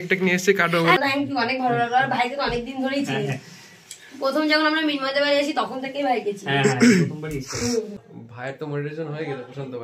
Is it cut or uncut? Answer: cut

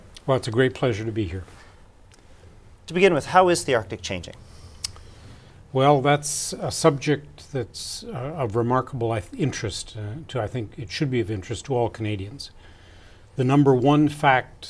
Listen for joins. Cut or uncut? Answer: cut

